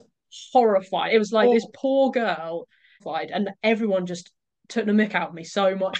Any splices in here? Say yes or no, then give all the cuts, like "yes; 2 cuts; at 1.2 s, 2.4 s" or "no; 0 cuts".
yes; 1 cut; at 3.0 s